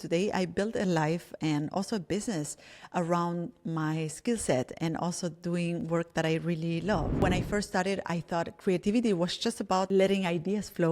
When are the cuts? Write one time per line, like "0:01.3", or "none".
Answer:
0:07.2
0:09.9